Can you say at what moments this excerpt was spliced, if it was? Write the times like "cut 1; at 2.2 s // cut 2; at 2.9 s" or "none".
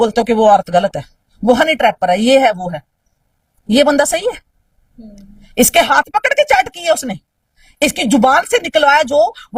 none